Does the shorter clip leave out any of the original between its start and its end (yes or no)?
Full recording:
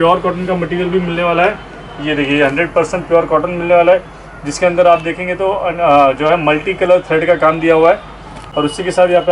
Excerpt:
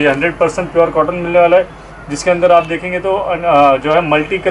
no